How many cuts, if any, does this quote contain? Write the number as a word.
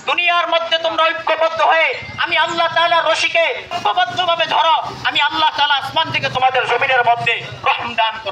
one